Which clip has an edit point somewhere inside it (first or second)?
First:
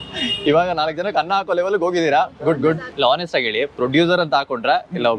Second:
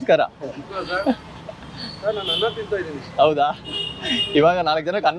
first